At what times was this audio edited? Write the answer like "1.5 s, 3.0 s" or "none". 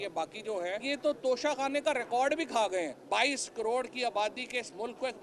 0.8 s, 3.0 s